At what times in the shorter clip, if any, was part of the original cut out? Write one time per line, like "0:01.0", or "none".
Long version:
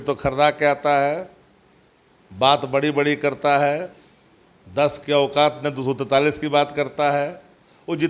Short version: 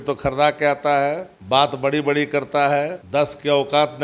0:01.3
0:03.0